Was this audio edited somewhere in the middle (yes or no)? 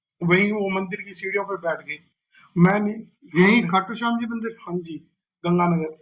no